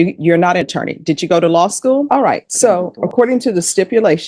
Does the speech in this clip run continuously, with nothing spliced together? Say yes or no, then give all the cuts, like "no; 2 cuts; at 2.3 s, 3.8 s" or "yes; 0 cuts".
no; 1 cut; at 2.1 s